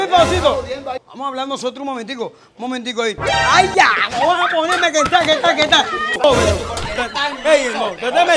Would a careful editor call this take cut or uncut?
cut